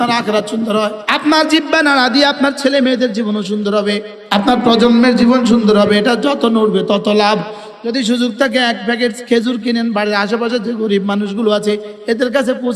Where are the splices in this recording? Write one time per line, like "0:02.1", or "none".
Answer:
0:01.0
0:04.1
0:07.6